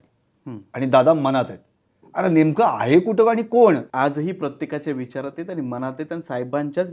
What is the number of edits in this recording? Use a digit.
1